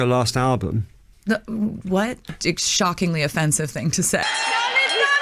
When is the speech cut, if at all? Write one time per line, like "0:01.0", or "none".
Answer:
0:02.4
0:04.2